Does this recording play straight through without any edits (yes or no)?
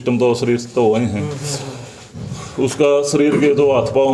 yes